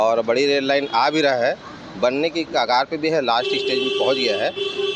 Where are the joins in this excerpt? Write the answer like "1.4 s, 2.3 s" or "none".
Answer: none